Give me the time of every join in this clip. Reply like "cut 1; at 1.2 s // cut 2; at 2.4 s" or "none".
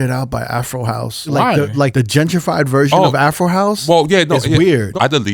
cut 1; at 1.2 s // cut 2; at 1.9 s